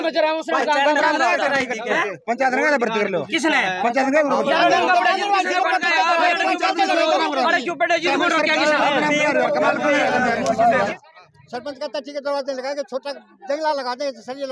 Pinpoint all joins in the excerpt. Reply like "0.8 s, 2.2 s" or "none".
10.7 s